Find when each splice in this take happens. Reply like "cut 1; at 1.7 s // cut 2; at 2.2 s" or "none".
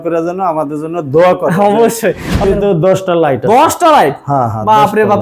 cut 1; at 2.4 s